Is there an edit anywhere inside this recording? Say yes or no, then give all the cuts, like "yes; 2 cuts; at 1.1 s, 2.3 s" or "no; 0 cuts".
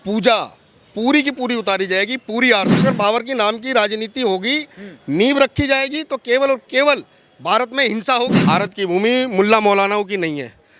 yes; 2 cuts; at 2.8 s, 8.4 s